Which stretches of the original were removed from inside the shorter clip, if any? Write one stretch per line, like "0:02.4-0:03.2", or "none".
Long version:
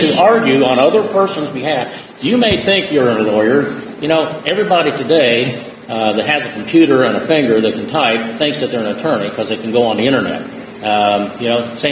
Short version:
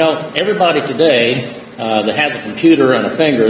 none

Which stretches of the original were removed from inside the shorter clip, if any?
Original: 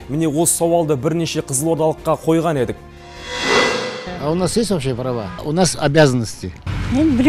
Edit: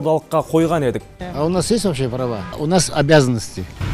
0:02.9-0:04.0

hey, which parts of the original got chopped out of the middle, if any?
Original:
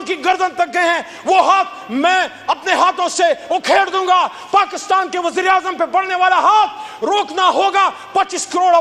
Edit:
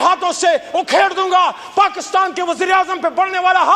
none

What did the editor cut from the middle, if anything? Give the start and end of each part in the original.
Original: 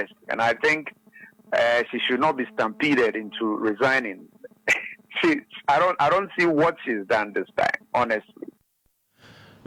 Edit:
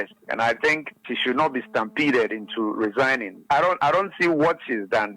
0:01.1-0:01.9
0:04.2-0:05.5

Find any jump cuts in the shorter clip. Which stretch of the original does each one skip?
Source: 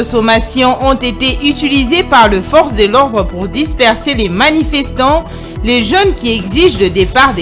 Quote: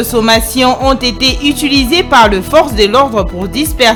none

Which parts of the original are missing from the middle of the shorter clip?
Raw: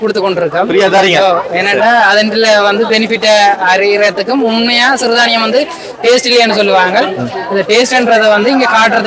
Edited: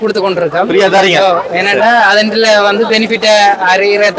none

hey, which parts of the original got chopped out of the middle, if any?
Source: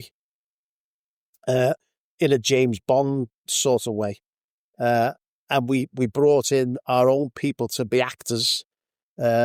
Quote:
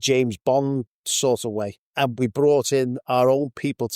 0:04.5-0:05.9

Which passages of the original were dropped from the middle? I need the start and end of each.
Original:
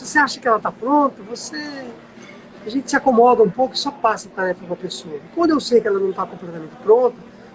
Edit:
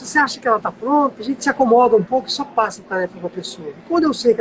0:01.2-0:02.6

